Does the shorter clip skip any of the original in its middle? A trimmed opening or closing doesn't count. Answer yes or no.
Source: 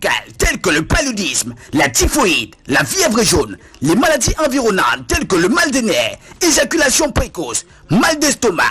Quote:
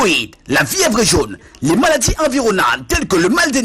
no